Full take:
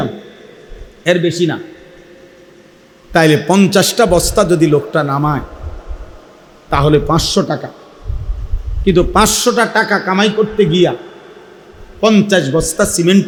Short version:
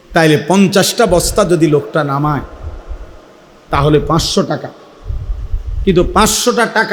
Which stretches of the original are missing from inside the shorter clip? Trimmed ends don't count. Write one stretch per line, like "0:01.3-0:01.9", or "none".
none